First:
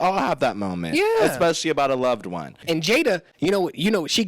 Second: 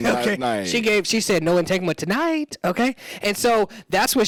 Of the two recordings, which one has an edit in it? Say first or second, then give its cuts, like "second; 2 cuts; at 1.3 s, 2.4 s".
first; 1 cut; at 2.5 s